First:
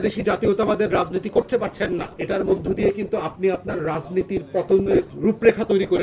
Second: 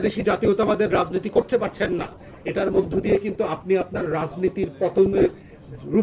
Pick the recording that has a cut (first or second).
first